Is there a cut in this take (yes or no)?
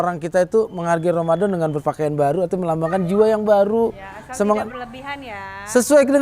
no